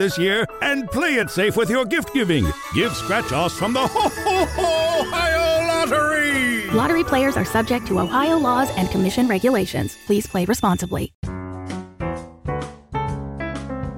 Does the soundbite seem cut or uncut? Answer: cut